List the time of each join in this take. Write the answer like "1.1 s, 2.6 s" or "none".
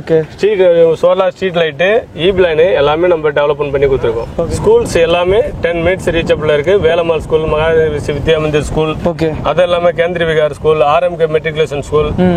4.3 s